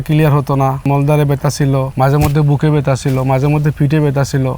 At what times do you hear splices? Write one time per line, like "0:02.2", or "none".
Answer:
0:00.8
0:01.9